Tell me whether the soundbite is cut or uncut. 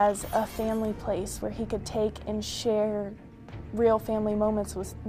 uncut